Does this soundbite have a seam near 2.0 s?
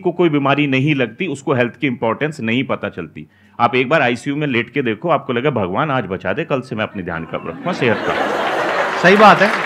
no; 0 cuts

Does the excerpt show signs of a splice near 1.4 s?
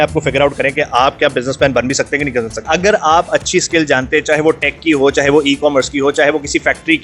no; 1 cut; at 2.7 s

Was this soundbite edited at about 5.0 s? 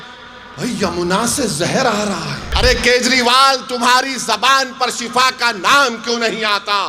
no; 1 cut; at 2.4 s

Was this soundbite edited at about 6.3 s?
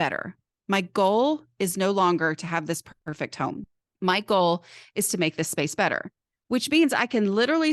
yes; 2 cuts; at 3.0 s, 6.3 s

